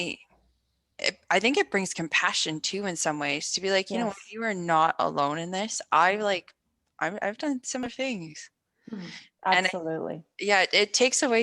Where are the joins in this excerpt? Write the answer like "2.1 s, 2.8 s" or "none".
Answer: 7.9 s